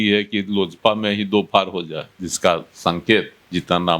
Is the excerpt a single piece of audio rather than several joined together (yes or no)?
no